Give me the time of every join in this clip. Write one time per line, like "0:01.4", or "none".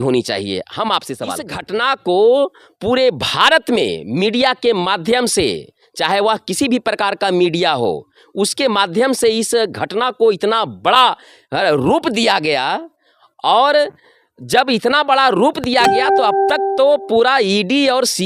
0:01.6